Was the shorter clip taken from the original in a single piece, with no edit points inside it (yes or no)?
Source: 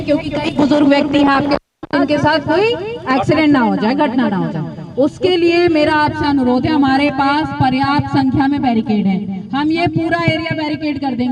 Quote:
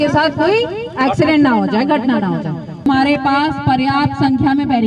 no